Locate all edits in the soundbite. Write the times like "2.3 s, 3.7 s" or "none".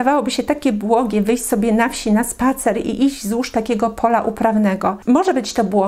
none